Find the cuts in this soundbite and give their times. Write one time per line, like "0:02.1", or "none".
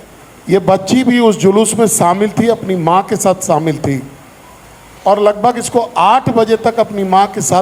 none